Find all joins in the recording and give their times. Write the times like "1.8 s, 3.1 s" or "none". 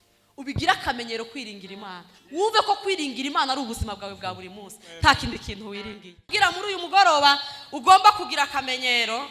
6.2 s